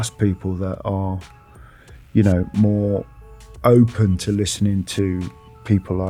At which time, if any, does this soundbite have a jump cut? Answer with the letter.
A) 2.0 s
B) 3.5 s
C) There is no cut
C